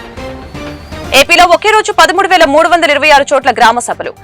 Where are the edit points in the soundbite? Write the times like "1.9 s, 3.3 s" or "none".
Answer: 1.0 s

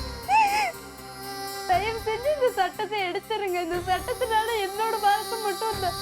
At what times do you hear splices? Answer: 1.7 s

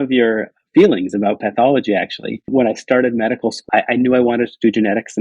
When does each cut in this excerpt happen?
2.5 s, 3.6 s

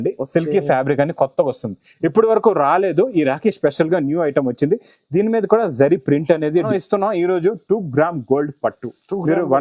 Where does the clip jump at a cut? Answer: 6.7 s

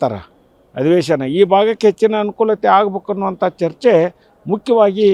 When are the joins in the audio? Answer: none

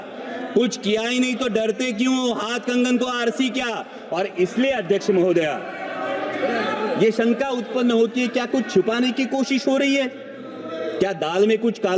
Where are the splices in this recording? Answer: none

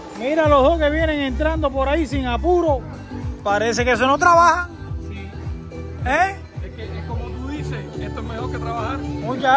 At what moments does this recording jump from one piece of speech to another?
none

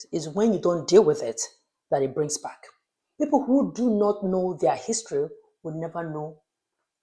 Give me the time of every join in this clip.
none

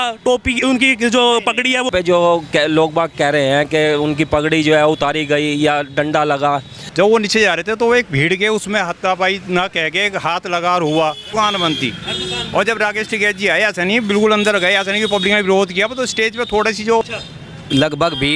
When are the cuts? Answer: 1.9 s, 6.8 s, 11.2 s, 17.0 s

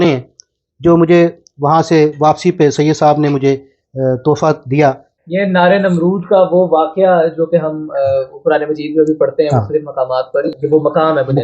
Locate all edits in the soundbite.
5.1 s, 10.5 s

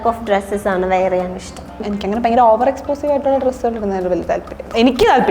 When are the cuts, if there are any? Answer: 1.8 s

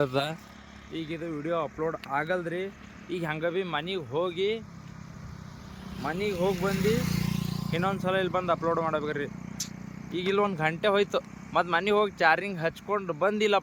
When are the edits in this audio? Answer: none

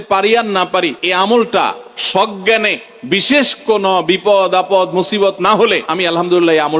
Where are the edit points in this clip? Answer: 1.0 s, 5.9 s

